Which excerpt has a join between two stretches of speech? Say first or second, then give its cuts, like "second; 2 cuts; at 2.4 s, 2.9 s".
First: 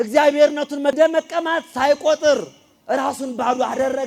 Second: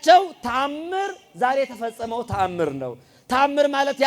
first; 1 cut; at 0.9 s